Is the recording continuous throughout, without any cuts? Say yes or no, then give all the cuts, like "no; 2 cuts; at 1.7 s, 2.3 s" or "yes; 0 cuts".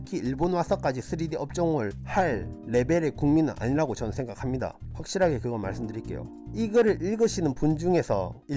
no; 1 cut; at 6.4 s